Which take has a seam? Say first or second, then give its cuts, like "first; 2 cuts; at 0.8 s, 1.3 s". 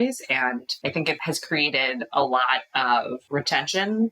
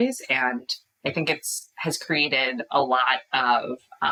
first; 2 cuts; at 0.9 s, 3.2 s